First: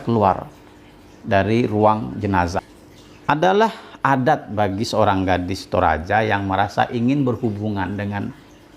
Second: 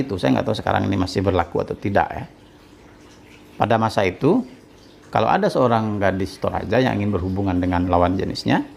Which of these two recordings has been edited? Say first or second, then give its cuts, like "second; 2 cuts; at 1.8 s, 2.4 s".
first; 1 cut; at 2.7 s